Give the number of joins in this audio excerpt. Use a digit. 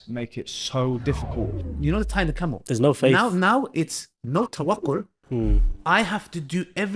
1